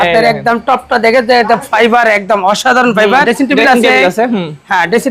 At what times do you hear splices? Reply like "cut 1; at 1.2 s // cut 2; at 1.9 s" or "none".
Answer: cut 1; at 3.3 s